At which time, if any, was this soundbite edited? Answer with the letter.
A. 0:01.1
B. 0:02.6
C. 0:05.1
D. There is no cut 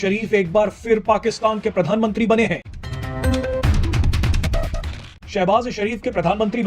D